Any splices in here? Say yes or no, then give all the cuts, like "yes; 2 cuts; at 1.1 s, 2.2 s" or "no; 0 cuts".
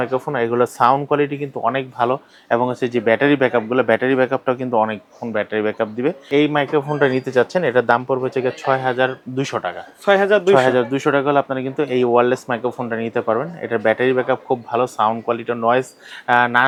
no; 0 cuts